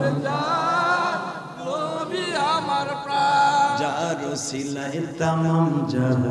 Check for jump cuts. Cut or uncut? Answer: uncut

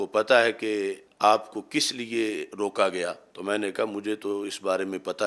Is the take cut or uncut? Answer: cut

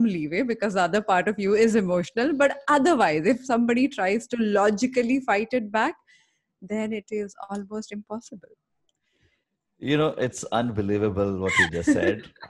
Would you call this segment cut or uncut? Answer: uncut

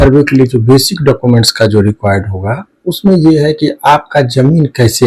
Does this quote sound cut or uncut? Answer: uncut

